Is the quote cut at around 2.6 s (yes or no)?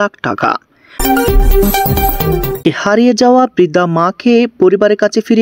yes